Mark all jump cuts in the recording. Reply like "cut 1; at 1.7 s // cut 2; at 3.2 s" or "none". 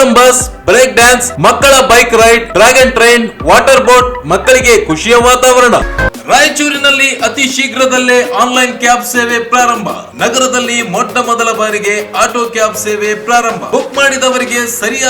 cut 1; at 5.9 s